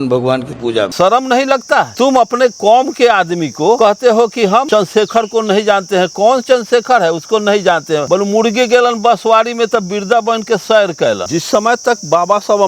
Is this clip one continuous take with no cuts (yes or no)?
no